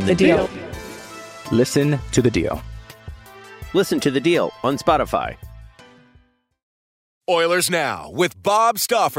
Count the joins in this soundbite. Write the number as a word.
one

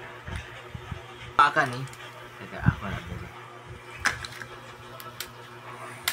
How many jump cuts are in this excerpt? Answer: one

